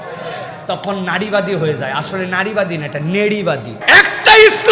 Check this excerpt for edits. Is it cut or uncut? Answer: cut